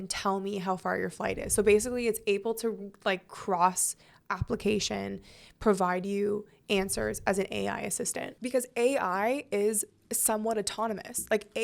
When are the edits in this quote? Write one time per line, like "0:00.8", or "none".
0:08.3